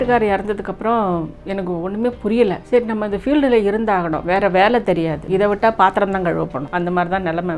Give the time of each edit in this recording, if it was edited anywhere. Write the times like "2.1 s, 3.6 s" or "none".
2.6 s, 5.2 s, 6.6 s